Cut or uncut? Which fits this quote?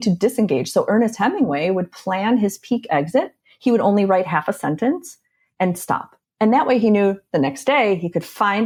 uncut